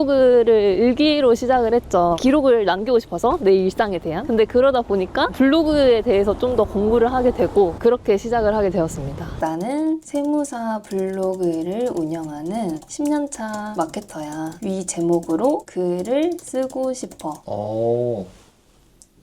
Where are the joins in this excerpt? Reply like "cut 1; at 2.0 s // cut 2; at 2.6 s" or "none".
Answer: cut 1; at 7.8 s // cut 2; at 9.4 s // cut 3; at 17.4 s